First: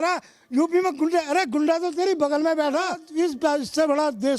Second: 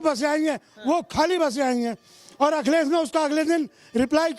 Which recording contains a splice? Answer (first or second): first